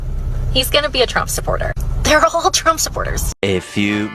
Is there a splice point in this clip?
yes; 1 cut; at 3.2 s

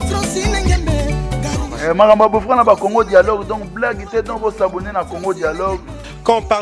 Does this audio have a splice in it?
yes; 1 cut; at 1.0 s

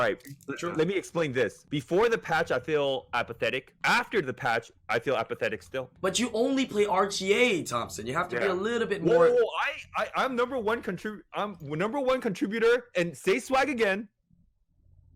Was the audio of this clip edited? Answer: yes; 3 cuts; at 1.6 s, 3.7 s, 5.9 s

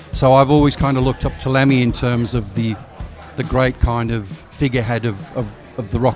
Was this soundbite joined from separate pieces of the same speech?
no; 0 cuts

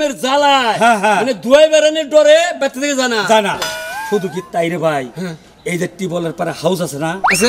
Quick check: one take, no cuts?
yes; 0 cuts

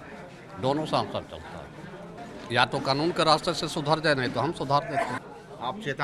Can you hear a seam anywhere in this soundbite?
yes; 2 cuts; at 2.2 s, 5.2 s

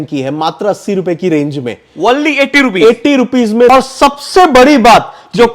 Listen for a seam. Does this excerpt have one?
yes; 1 cut; at 3.7 s

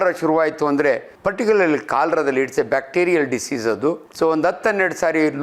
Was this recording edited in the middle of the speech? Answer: yes; 2 cuts; at 1.1 s, 4.1 s

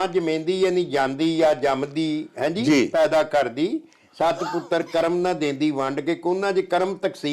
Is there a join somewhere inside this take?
no; 0 cuts

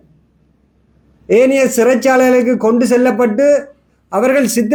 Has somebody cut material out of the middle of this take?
no; 0 cuts

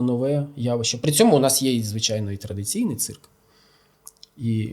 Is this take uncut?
yes; 0 cuts

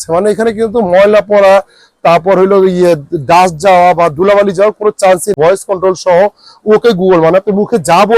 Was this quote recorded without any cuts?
no; 1 cut; at 5.3 s

